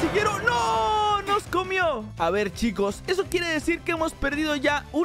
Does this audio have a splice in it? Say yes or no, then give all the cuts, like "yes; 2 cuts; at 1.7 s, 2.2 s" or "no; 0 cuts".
no; 0 cuts